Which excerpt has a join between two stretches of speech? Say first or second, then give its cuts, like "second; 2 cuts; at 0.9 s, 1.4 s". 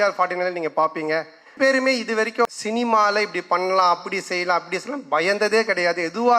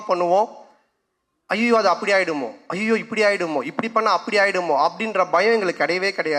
first; 2 cuts; at 1.5 s, 2.5 s